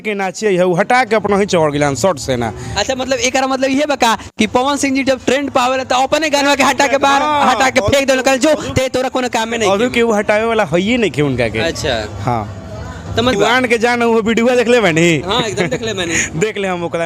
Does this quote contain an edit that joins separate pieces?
yes; 1 cut; at 13.3 s

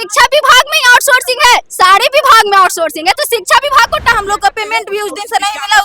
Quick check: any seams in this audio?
yes; 1 cut; at 4.1 s

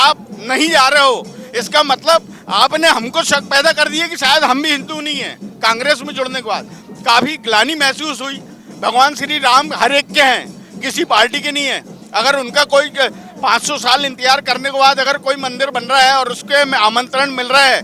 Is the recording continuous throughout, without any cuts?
yes; 0 cuts

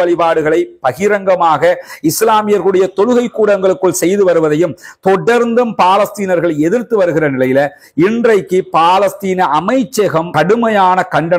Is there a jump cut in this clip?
no; 0 cuts

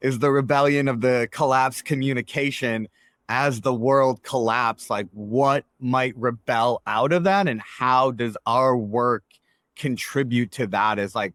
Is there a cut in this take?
no; 0 cuts

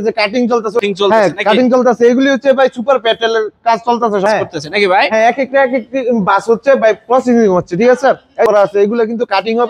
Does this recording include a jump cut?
yes; 3 cuts; at 0.8 s, 4.2 s, 8.5 s

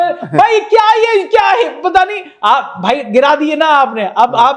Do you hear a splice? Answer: no; 0 cuts

